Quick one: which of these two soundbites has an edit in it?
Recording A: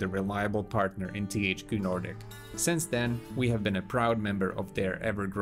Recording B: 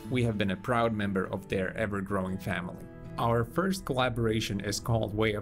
A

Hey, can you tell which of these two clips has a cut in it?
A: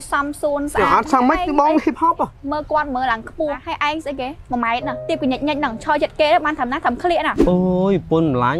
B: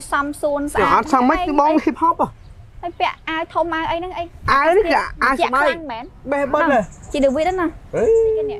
A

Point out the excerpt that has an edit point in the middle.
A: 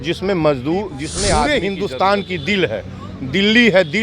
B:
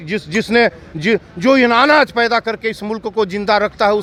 A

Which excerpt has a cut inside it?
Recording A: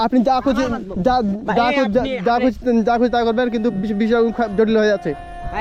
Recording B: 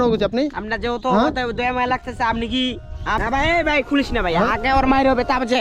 B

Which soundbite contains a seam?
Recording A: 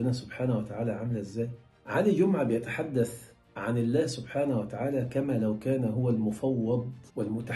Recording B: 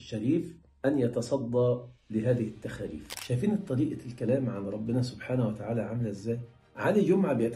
B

